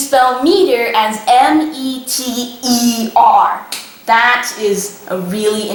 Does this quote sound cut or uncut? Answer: uncut